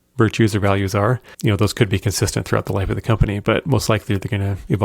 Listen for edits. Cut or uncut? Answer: cut